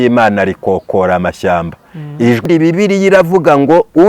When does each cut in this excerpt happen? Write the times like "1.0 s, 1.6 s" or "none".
2.4 s